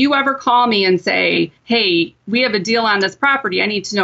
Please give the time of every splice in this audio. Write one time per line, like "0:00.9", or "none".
0:01.6